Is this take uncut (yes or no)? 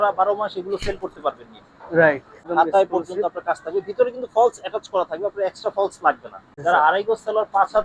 no